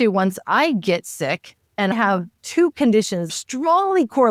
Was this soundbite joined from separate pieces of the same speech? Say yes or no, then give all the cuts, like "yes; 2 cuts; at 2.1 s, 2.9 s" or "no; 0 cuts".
yes; 2 cuts; at 1.9 s, 3.3 s